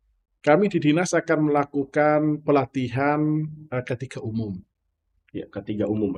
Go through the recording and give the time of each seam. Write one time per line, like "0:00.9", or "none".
none